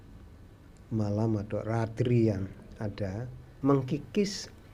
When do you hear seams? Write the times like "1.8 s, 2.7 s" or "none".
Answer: 3.4 s